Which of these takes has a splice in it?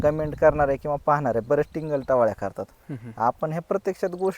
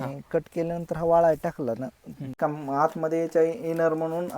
second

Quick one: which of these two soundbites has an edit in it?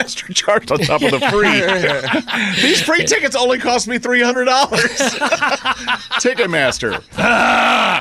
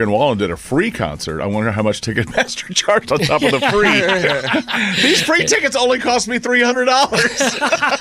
first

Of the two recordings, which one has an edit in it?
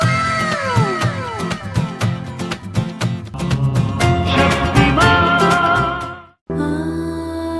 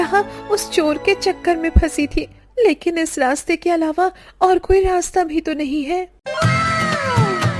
first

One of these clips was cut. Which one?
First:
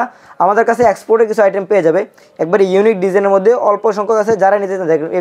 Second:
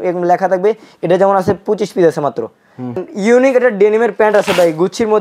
second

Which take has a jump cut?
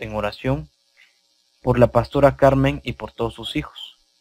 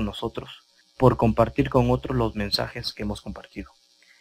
second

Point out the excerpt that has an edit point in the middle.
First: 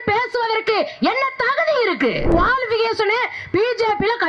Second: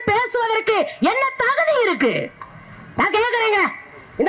first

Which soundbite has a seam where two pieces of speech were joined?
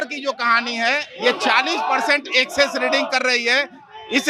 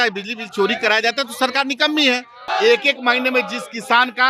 second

